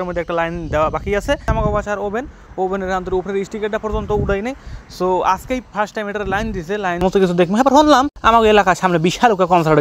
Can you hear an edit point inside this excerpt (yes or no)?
yes